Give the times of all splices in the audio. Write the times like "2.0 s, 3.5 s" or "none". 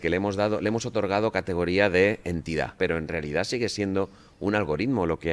2.7 s